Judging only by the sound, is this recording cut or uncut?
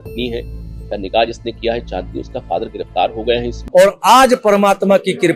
cut